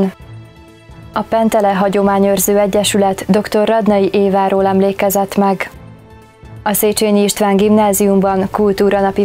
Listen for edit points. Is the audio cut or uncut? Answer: uncut